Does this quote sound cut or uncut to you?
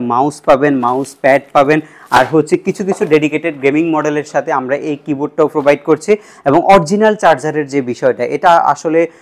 uncut